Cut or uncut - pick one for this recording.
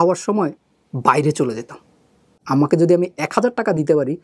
cut